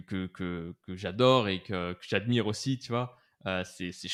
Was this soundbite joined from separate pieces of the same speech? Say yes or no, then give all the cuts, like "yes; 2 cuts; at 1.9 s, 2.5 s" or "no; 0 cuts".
no; 0 cuts